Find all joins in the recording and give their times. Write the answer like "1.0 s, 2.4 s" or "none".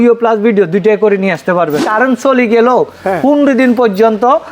1.8 s